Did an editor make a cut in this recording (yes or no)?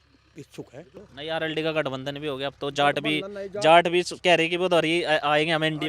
yes